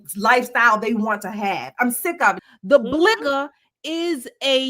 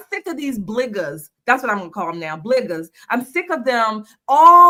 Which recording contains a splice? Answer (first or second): first